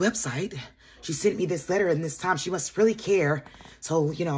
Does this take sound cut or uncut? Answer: uncut